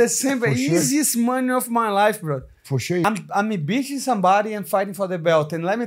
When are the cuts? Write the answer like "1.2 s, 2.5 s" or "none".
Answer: 3.0 s

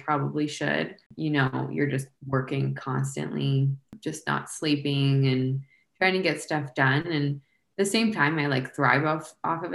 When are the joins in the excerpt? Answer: 1.1 s, 4.0 s

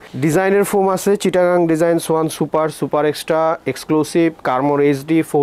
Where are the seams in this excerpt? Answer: none

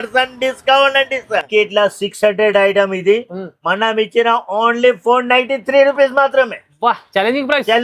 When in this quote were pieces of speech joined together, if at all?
1.5 s

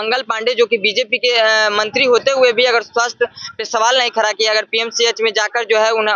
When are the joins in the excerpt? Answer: none

